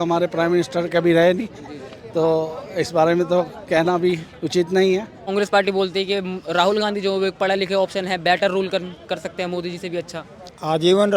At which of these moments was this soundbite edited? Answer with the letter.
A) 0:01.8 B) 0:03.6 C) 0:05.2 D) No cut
C